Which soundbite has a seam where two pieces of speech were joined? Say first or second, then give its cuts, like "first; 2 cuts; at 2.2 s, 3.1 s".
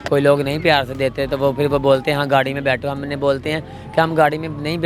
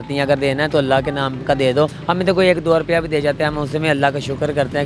second; 1 cut; at 2.0 s